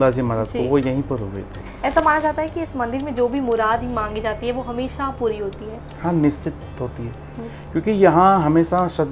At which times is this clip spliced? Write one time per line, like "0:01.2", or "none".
none